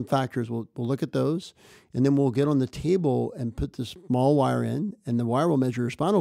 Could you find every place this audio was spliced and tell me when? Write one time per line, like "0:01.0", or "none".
none